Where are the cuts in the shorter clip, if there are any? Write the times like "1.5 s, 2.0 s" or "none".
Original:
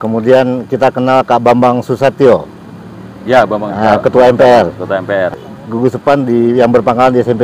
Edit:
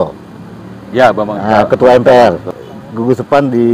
2.6 s